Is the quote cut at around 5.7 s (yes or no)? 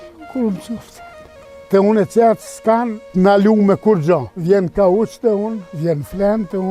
yes